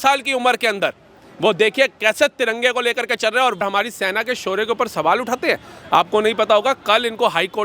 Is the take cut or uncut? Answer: cut